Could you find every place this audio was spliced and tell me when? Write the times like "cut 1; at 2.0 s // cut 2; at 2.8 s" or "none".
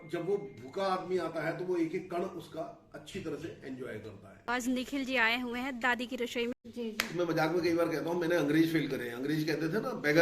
cut 1; at 4.5 s // cut 2; at 6.6 s